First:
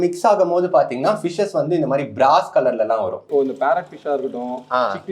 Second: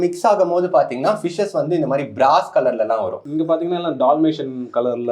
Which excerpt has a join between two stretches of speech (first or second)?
first